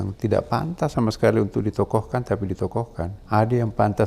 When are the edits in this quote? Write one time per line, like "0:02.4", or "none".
0:03.2